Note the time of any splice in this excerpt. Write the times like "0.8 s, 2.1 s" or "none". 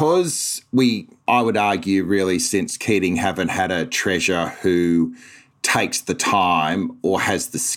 1.2 s